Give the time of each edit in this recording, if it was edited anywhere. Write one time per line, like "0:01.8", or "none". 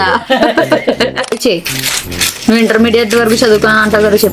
0:01.3